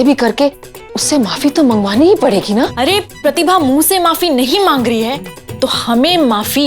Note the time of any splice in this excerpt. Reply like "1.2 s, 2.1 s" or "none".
0.9 s, 3.2 s